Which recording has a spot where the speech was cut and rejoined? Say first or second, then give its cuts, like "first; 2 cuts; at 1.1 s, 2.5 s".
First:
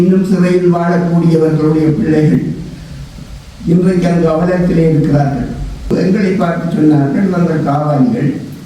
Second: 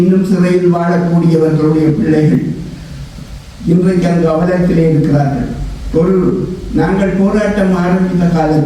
first; 1 cut; at 5.9 s